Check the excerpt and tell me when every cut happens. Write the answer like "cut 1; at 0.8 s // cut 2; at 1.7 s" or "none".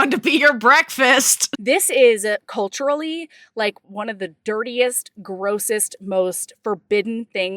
cut 1; at 1.4 s // cut 2; at 3.8 s